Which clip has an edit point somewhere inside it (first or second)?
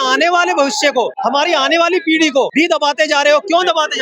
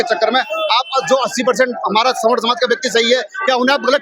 first